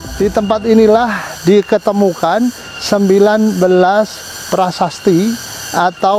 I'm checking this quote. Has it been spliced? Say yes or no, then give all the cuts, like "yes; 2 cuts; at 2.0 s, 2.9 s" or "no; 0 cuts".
no; 0 cuts